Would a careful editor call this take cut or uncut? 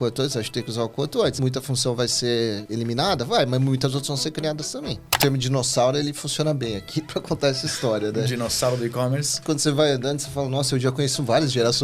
cut